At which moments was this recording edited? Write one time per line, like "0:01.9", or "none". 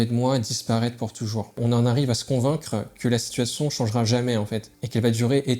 0:01.6